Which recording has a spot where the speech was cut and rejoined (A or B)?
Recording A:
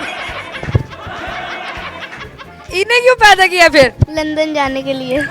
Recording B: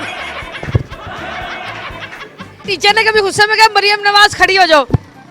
B